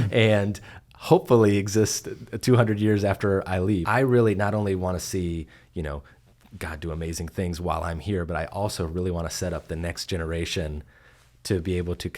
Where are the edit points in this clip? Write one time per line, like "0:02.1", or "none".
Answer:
0:03.8